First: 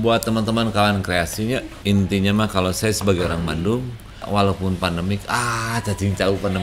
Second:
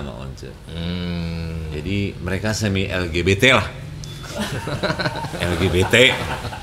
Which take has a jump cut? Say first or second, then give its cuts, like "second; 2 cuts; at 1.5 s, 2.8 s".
first; 2 cuts; at 1.7 s, 4.2 s